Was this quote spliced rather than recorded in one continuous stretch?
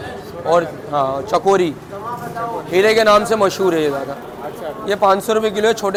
no; 0 cuts

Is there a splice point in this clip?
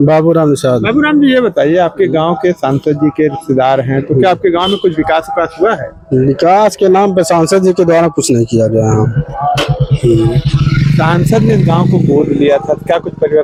no; 0 cuts

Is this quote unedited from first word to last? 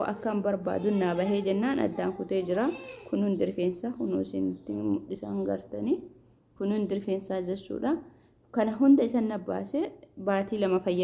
yes; 0 cuts

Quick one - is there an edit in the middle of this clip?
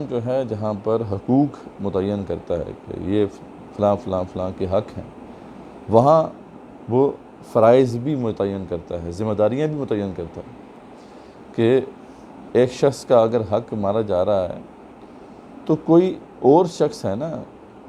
no; 0 cuts

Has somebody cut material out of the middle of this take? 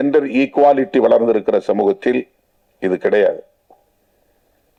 no; 0 cuts

